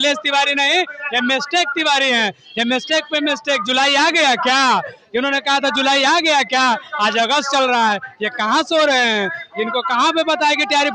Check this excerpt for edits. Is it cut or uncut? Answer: uncut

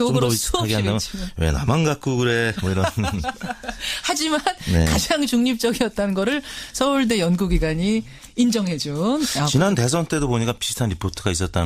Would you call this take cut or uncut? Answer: cut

